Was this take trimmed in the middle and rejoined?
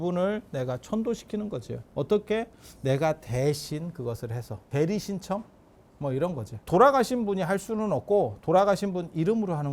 yes; 3 cuts; at 1.8 s, 4.7 s, 6.7 s

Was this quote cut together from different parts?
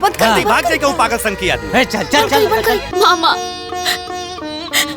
yes; 1 cut; at 2.9 s

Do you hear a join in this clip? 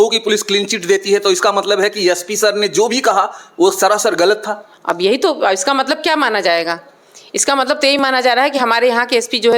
no; 0 cuts

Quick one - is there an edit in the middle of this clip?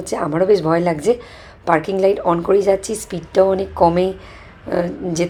no; 0 cuts

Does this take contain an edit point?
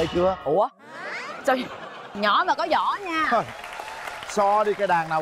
no; 0 cuts

